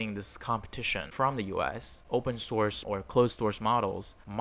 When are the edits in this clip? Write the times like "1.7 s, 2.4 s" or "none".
1.0 s, 2.0 s, 2.8 s